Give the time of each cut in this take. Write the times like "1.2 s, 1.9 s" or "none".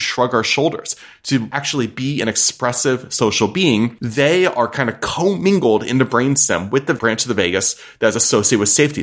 1.6 s